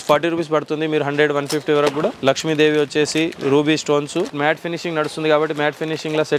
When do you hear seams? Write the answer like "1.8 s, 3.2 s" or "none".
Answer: 2.2 s, 4.3 s